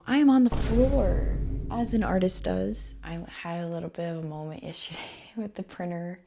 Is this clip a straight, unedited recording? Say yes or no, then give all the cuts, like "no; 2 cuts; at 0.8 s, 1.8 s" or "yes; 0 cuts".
no; 1 cut; at 2.9 s